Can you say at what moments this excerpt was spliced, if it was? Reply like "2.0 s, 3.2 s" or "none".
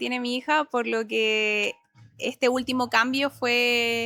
none

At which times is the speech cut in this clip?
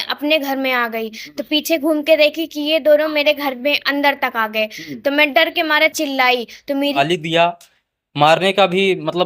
7.0 s

